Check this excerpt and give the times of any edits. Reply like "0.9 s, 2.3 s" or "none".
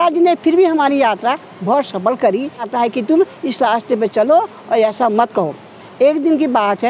2.7 s